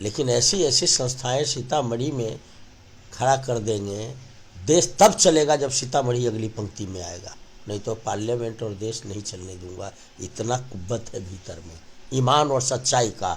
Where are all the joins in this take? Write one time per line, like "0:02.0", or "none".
none